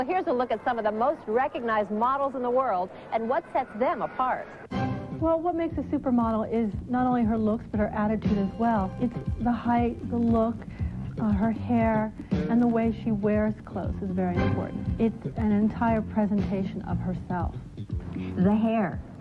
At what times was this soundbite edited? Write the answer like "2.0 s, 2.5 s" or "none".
none